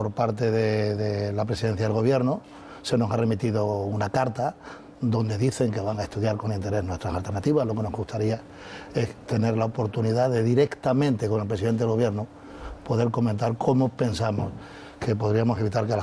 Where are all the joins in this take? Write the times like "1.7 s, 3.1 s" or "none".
6.2 s